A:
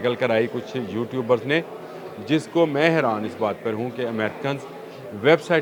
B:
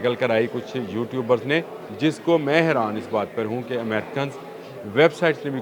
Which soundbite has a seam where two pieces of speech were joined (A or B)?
B